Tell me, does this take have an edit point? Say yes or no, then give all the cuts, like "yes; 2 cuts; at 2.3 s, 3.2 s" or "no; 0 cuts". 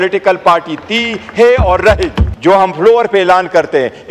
yes; 1 cut; at 2.2 s